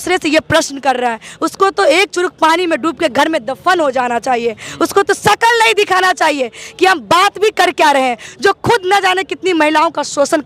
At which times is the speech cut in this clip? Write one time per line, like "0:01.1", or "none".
none